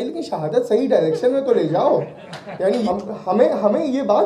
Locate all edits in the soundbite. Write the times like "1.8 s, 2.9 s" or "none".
2.9 s